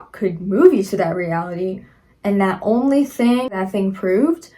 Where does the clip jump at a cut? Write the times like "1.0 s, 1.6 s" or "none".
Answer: 3.5 s